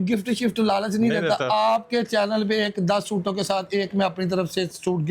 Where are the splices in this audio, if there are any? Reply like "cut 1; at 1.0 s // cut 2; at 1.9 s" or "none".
none